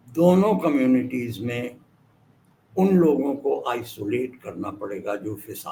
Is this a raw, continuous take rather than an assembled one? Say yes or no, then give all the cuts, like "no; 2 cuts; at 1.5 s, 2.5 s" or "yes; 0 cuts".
yes; 0 cuts